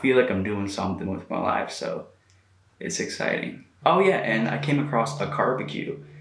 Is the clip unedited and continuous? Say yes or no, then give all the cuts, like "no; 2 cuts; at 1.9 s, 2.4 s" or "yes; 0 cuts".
no; 1 cut; at 3.6 s